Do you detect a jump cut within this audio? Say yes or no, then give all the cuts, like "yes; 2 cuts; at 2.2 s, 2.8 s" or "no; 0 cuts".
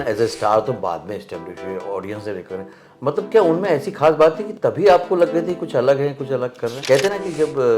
yes; 1 cut; at 6.8 s